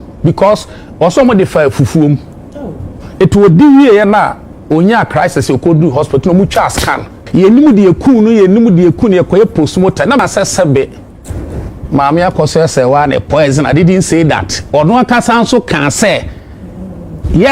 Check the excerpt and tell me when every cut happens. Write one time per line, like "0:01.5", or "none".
0:07.2
0:10.2